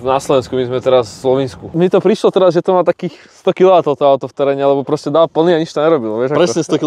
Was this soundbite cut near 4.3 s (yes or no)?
no